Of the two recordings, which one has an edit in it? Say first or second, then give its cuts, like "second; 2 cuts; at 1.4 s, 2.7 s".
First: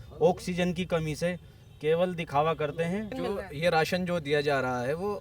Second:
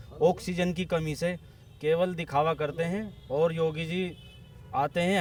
first; 1 cut; at 3.1 s